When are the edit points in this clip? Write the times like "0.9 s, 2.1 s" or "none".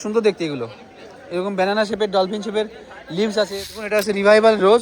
3.7 s